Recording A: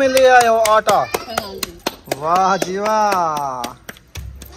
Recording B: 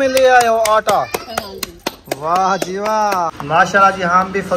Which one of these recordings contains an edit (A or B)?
B